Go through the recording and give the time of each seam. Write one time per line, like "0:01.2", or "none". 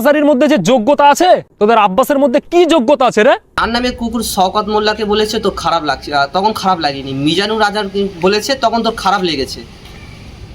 0:03.5